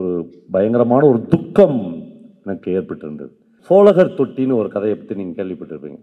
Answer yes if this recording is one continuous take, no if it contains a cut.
no